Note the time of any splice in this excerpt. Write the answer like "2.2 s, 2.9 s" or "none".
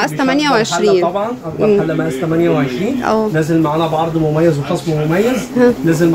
none